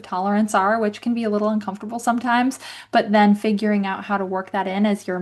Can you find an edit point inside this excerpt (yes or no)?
no